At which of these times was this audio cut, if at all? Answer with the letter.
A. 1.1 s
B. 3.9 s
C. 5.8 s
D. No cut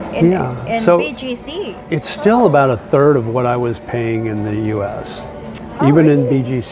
D